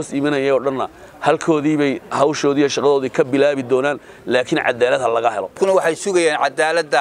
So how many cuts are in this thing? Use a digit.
1